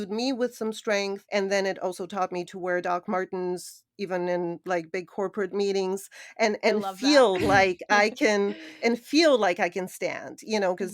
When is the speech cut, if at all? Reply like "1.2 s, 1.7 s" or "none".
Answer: 1.2 s